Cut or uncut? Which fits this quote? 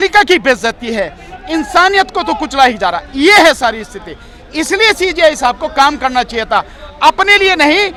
uncut